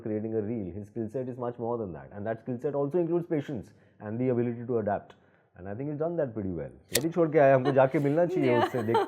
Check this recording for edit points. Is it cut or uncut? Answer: cut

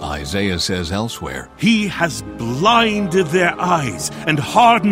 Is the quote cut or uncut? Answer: cut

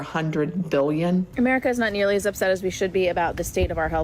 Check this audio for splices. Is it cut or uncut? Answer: cut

